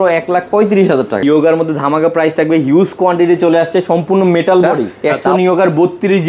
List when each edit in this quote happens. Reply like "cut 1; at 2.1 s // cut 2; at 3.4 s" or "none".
cut 1; at 1.2 s // cut 2; at 4.9 s